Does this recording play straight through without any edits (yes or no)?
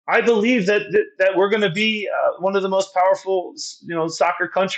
yes